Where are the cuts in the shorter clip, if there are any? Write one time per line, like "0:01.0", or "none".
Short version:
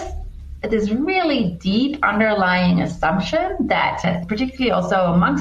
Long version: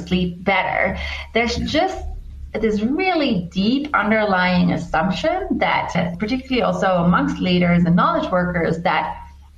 none